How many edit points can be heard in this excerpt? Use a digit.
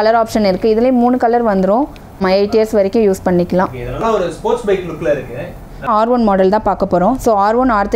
2